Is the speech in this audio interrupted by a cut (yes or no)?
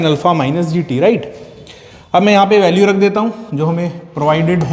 no